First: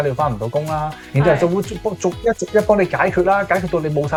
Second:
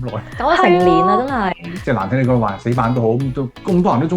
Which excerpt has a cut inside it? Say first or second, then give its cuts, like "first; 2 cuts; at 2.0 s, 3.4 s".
second; 1 cut; at 1.7 s